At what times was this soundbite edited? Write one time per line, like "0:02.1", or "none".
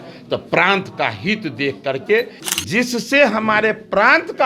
0:02.4